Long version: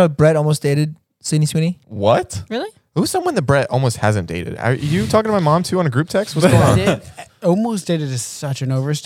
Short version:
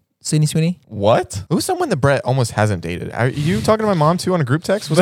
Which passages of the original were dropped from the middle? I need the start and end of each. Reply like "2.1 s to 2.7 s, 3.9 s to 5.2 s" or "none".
2.4 s to 2.8 s